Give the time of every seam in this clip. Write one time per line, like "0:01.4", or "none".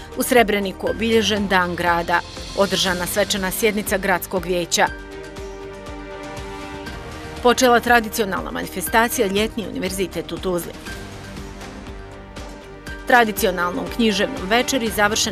none